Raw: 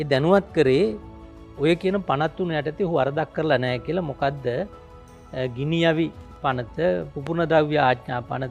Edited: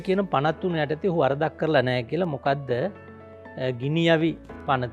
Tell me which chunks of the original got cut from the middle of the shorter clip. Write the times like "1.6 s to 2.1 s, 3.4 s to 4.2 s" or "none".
none